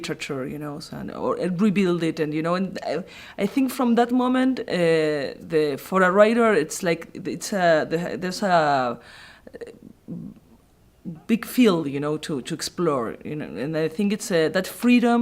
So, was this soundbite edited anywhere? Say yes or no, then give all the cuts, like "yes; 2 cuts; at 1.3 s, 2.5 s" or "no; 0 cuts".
yes; 1 cut; at 3.1 s